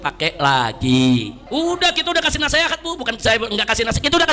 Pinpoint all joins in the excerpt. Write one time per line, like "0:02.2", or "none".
0:01.4